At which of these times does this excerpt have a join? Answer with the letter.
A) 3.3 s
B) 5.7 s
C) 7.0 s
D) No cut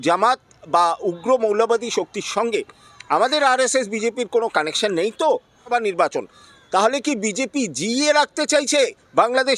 B